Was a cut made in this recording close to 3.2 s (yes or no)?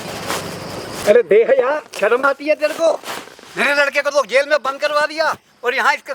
no